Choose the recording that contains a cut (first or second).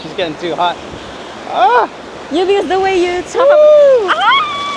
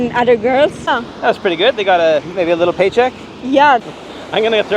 second